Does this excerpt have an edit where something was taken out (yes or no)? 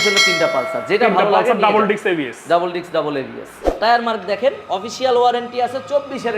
yes